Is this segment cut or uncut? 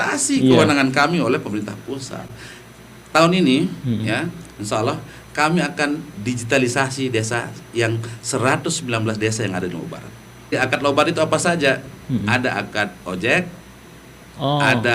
cut